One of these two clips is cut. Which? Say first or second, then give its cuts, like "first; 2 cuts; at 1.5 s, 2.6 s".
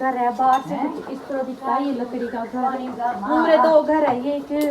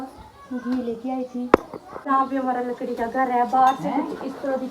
second; 1 cut; at 2.1 s